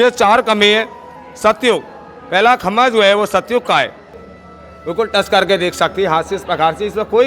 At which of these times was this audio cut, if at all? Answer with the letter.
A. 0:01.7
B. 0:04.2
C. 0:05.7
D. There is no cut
B